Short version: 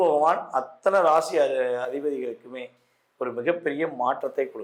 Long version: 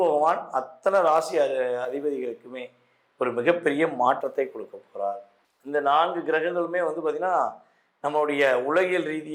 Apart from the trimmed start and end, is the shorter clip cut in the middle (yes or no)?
no